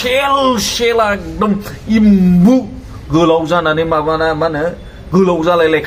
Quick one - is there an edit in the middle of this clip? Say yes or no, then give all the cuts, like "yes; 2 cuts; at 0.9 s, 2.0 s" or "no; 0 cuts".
no; 0 cuts